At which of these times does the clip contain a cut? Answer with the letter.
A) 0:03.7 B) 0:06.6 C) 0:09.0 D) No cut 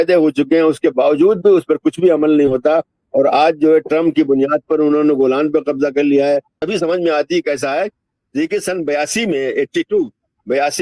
B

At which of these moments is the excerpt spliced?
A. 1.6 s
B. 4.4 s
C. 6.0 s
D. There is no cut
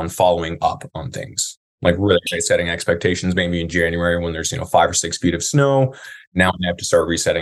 D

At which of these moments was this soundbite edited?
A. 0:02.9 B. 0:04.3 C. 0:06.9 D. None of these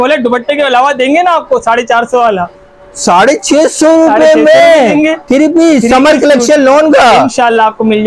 D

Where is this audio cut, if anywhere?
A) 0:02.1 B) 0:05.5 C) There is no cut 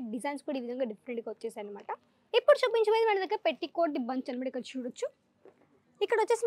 A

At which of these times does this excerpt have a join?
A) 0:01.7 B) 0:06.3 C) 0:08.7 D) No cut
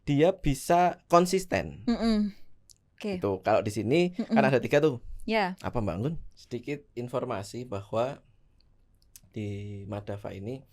B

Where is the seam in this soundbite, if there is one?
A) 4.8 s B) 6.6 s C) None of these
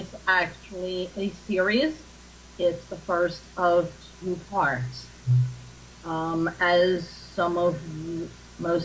A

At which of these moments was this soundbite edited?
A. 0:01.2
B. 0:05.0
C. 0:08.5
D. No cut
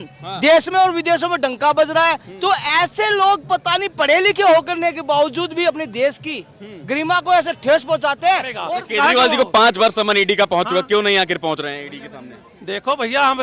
C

